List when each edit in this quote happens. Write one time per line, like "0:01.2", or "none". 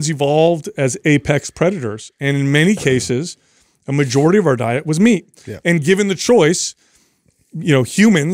none